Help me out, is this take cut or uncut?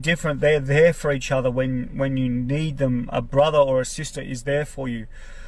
uncut